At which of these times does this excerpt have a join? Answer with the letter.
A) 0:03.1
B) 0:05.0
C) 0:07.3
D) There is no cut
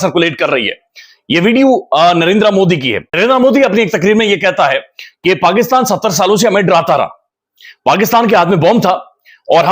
A